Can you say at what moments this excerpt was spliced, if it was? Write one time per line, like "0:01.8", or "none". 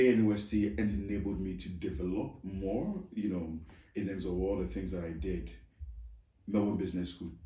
none